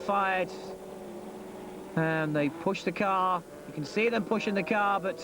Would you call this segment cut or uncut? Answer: uncut